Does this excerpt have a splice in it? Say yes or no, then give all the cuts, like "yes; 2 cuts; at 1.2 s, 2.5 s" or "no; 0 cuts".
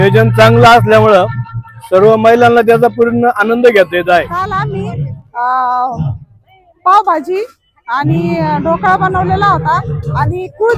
yes; 1 cut; at 4.7 s